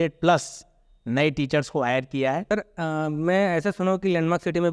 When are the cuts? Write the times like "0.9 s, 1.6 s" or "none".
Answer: 2.5 s